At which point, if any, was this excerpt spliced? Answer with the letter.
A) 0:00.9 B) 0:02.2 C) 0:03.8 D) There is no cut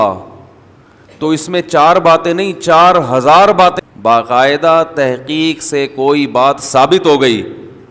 C